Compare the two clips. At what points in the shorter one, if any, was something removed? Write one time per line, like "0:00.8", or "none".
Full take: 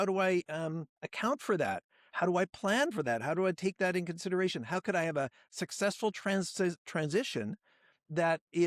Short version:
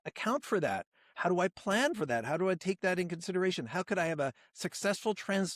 none